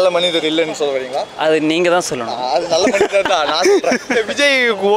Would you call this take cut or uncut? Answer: uncut